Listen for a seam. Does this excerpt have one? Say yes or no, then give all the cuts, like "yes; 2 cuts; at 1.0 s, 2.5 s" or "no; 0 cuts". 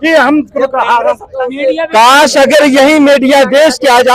yes; 1 cut; at 1.3 s